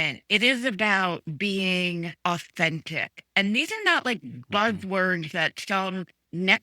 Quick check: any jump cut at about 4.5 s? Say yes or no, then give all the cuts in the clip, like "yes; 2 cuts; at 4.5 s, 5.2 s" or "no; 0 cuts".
no; 1 cut; at 2.1 s